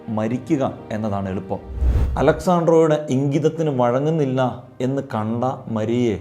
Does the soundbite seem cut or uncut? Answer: cut